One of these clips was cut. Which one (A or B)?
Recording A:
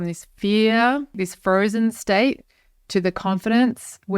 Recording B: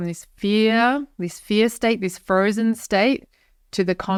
A